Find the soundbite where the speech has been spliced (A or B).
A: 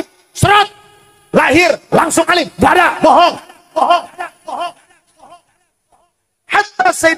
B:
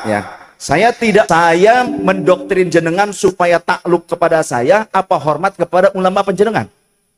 B